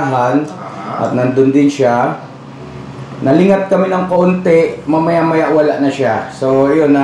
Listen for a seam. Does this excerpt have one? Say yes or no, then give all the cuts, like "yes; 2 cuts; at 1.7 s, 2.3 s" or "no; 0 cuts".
no; 0 cuts